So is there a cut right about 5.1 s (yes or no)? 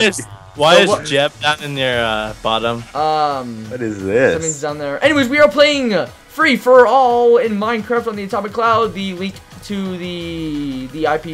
no